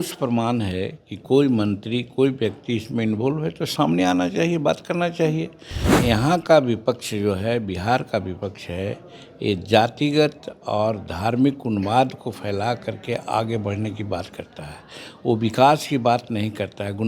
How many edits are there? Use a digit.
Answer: 1